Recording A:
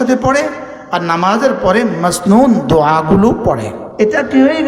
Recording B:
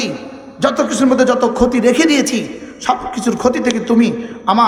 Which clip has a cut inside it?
A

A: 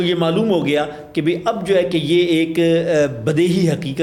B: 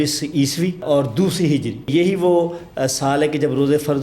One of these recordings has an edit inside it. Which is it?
B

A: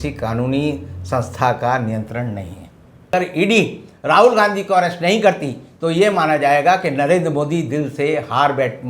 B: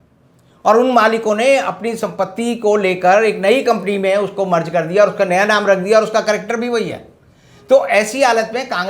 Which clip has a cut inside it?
A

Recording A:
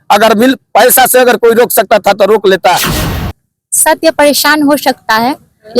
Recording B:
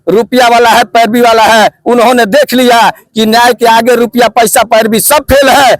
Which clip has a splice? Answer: A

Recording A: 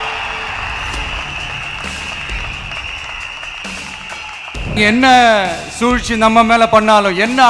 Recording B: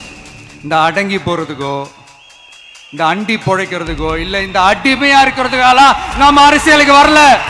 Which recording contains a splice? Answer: A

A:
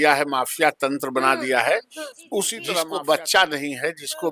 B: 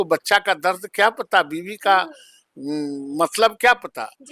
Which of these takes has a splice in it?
A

